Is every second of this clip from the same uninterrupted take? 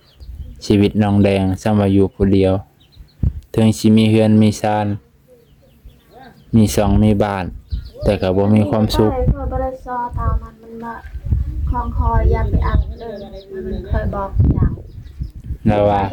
yes; 0 cuts

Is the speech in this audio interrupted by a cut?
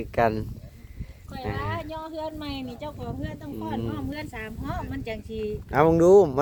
no; 0 cuts

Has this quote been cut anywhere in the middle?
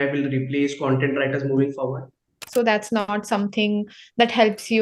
yes; 1 cut; at 2.5 s

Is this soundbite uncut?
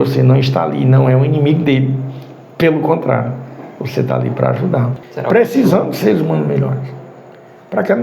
no; 1 cut; at 5.0 s

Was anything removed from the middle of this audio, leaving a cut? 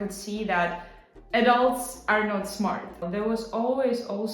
yes; 1 cut; at 3.0 s

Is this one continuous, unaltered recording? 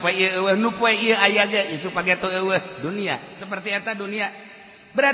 yes; 0 cuts

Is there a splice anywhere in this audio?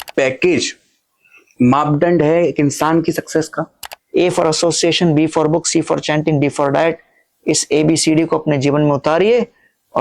yes; 1 cut; at 3.9 s

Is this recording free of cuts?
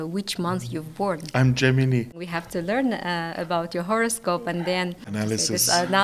no; 2 cuts; at 2.2 s, 5.1 s

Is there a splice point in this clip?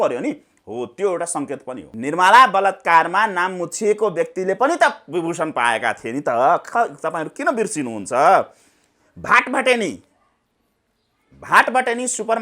yes; 1 cut; at 1.9 s

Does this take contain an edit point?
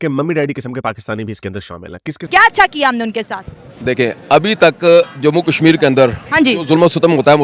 yes; 1 cut; at 2.2 s

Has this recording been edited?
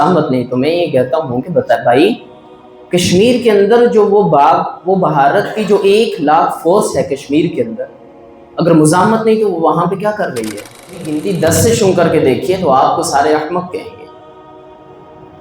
yes; 1 cut; at 11.2 s

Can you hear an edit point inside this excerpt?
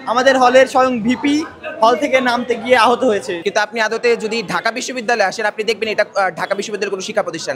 yes; 1 cut; at 3.3 s

